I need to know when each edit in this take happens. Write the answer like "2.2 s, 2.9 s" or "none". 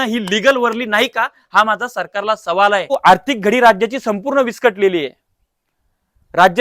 2.9 s